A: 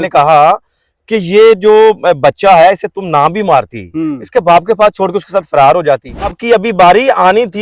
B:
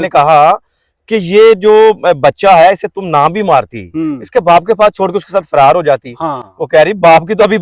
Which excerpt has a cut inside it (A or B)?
A